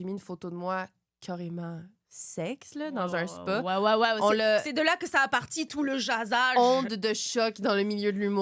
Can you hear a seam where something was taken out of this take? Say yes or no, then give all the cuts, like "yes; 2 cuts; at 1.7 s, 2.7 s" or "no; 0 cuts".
no; 0 cuts